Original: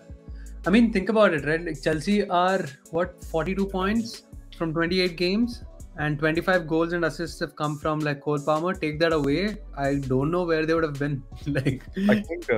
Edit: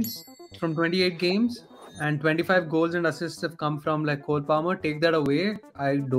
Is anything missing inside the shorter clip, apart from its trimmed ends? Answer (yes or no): no